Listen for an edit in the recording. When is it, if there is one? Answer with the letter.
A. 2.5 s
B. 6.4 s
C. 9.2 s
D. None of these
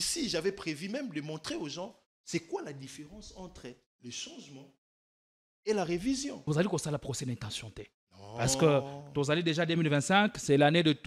B